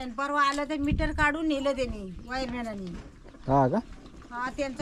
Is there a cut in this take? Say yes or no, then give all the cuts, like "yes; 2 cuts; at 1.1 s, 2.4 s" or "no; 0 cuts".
no; 0 cuts